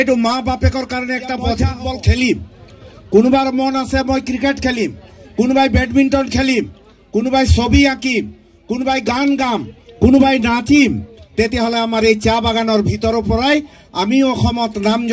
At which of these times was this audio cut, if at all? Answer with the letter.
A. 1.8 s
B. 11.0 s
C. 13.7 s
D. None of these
A